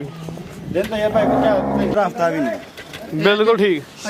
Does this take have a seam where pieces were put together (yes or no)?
yes